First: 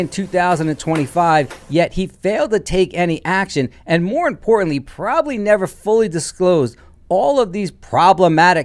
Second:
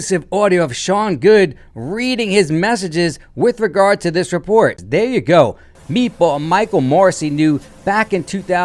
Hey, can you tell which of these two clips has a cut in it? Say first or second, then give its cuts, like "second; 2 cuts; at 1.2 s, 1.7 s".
second; 1 cut; at 4.8 s